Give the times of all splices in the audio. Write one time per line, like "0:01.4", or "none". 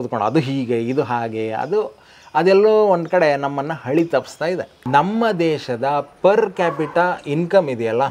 0:04.8

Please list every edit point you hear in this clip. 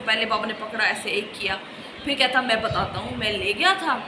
none

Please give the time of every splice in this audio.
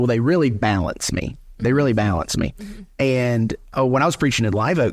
0:03.7

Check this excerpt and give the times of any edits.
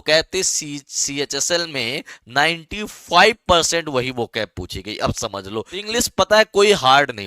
0:05.9

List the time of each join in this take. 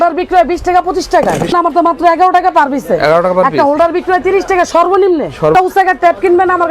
0:01.5
0:05.5

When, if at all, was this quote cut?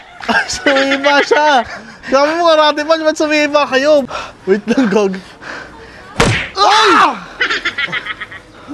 0:04.1

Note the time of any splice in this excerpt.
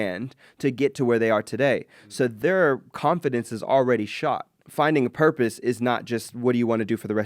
0:02.3
0:04.6

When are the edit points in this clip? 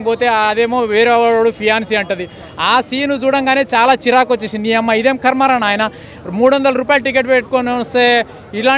none

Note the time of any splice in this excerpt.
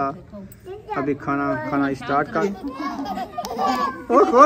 0:02.4

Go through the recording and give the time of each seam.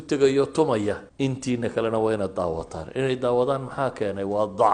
0:01.1

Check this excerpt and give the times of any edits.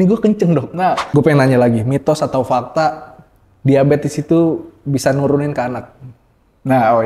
0:01.0

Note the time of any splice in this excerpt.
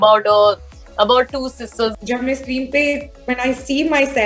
0:01.9

